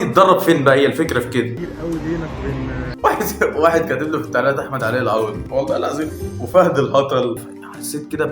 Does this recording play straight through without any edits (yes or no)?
no